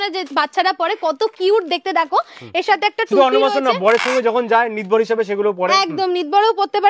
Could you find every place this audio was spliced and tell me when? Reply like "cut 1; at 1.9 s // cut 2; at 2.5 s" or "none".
none